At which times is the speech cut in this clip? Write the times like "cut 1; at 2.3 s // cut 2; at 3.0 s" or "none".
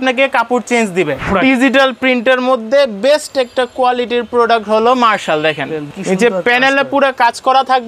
cut 1; at 1.2 s // cut 2; at 5.9 s